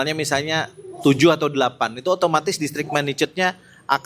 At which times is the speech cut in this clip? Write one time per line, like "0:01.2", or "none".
none